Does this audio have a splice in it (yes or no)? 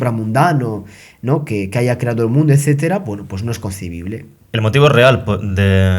yes